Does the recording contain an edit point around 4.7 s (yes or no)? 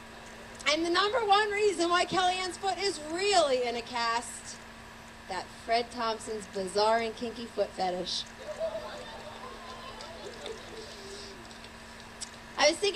yes